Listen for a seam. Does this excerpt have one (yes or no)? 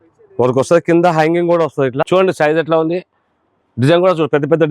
yes